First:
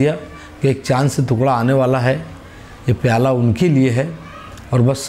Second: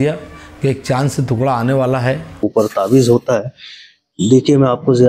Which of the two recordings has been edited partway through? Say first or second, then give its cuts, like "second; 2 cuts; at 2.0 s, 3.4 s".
second; 1 cut; at 2.4 s